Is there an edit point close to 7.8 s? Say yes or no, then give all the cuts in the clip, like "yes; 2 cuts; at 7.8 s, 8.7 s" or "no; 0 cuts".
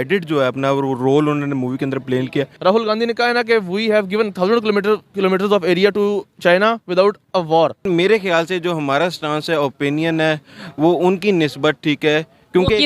yes; 2 cuts; at 2.5 s, 7.8 s